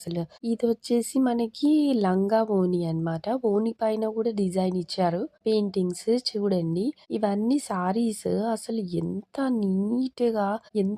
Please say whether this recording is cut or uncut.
uncut